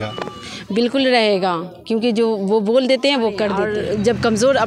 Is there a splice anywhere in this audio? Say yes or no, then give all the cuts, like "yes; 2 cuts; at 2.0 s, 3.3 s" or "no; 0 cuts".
yes; 1 cut; at 3.6 s